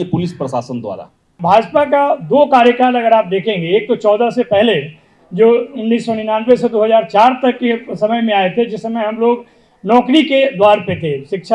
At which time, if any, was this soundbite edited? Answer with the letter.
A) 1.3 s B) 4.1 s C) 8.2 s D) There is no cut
A